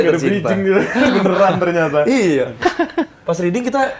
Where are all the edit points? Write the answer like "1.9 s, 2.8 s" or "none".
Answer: 2.6 s